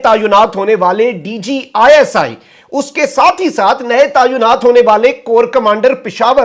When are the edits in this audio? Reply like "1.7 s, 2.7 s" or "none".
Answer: none